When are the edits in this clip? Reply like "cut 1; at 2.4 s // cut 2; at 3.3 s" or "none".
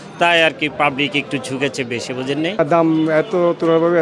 cut 1; at 2.5 s